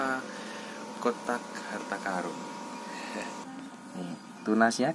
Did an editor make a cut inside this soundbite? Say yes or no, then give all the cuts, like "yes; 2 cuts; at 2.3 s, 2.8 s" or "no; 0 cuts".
yes; 1 cut; at 3.4 s